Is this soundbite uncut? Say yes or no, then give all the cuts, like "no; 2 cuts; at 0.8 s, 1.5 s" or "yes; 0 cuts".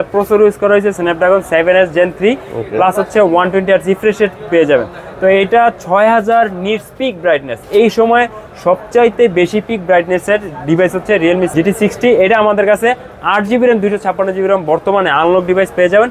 yes; 0 cuts